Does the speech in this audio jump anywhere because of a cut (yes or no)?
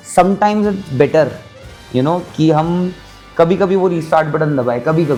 no